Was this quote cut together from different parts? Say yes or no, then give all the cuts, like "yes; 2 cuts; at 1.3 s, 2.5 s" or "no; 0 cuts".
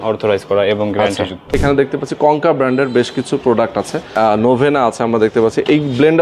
yes; 2 cuts; at 1.6 s, 4.0 s